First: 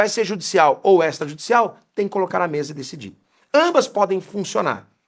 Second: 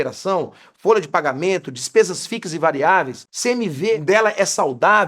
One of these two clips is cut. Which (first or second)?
second